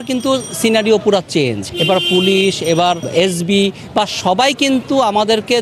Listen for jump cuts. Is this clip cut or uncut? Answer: cut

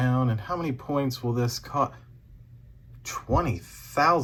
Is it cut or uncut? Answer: uncut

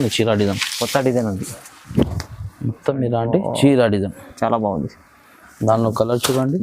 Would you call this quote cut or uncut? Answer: cut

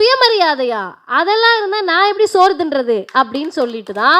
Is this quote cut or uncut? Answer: uncut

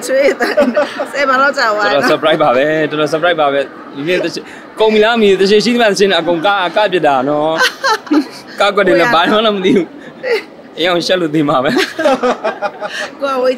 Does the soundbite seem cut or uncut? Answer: uncut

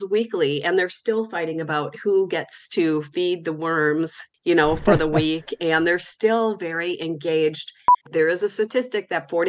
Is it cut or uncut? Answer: cut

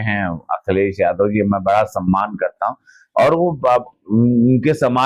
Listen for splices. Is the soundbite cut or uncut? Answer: uncut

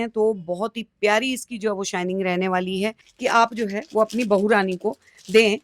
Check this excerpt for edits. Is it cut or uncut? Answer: cut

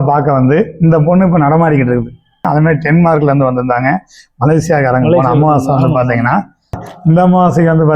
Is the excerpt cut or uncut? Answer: cut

